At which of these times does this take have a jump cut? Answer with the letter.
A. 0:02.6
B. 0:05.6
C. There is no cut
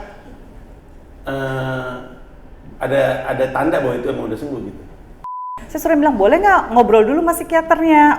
B